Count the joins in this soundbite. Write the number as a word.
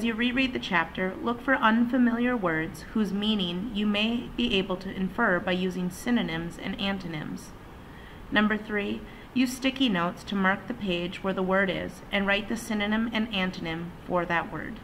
one